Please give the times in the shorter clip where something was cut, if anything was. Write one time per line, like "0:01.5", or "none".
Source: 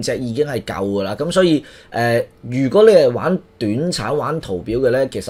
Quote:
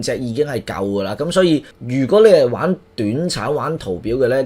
0:01.8